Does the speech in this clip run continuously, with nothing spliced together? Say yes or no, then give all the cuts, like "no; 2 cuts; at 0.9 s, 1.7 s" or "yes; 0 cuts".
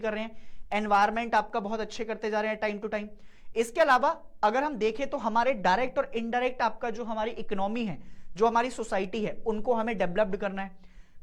yes; 0 cuts